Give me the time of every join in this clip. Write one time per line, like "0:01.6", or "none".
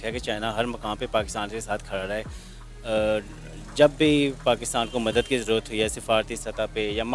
none